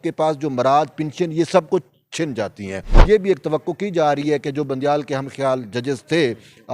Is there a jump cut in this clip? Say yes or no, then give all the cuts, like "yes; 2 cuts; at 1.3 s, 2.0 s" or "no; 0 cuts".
yes; 1 cut; at 2.9 s